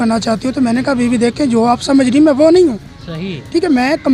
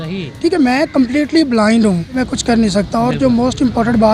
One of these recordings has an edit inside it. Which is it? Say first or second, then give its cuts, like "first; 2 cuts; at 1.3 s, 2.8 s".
second; 1 cut; at 2.3 s